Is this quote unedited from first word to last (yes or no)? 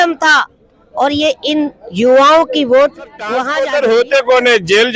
no